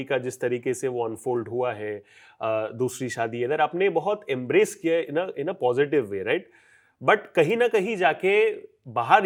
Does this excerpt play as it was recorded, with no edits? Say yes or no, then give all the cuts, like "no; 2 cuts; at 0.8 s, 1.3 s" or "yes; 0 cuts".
yes; 0 cuts